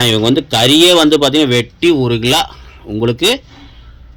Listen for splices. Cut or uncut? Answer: uncut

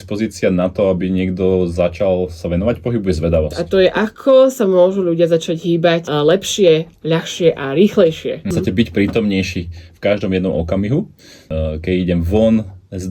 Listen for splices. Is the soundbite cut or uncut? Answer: cut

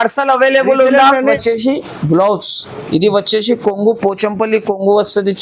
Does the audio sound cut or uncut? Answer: cut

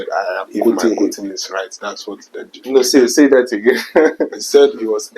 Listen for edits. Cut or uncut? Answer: uncut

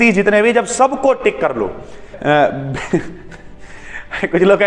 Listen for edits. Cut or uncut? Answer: cut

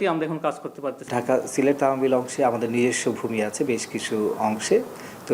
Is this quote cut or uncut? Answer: cut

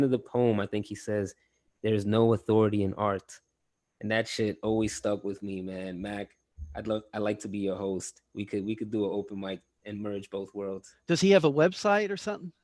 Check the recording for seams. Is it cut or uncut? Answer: uncut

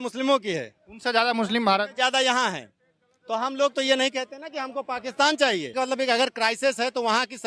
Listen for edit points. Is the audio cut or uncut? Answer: cut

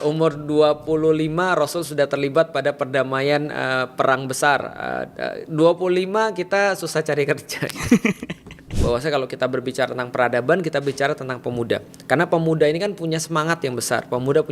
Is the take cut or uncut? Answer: cut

